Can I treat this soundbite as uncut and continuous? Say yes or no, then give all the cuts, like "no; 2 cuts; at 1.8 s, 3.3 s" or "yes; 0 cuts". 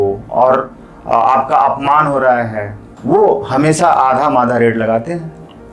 no; 1 cut; at 2.9 s